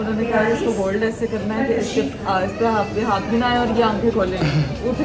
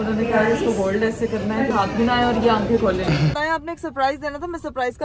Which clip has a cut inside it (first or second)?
second